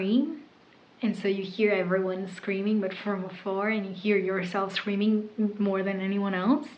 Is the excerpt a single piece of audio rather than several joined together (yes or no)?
yes